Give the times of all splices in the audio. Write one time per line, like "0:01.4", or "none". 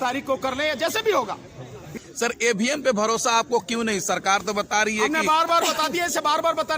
0:01.9